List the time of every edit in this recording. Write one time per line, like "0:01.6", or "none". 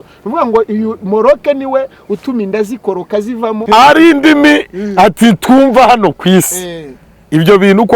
0:03.6